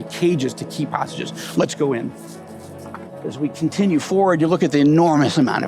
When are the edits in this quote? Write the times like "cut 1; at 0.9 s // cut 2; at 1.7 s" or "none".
cut 1; at 3.0 s